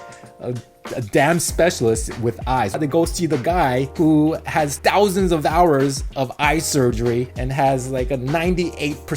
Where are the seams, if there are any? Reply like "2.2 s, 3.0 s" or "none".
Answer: 2.8 s, 3.9 s, 4.7 s, 7.4 s